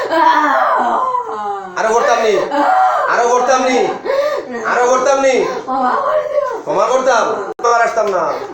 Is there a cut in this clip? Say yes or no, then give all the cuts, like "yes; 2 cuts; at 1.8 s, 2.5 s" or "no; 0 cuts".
yes; 1 cut; at 7.6 s